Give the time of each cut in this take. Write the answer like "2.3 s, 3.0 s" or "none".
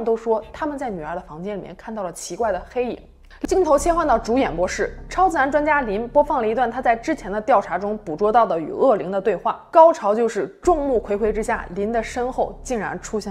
3.3 s, 9.6 s